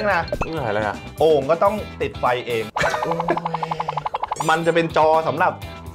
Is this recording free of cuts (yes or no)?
no